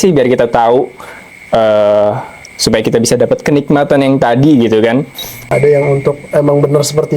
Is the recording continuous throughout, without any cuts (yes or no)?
no